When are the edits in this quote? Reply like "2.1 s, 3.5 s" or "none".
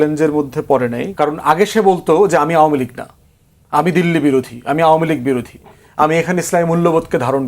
1.0 s